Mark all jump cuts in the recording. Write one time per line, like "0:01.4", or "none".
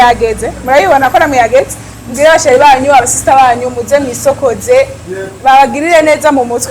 none